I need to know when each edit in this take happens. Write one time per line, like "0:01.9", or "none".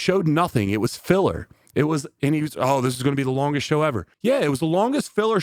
0:04.1